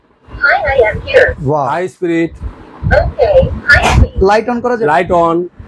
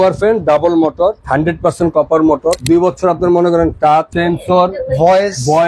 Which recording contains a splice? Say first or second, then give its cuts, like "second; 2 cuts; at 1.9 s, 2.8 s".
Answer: second; 3 cuts; at 1.2 s, 2.6 s, 4.1 s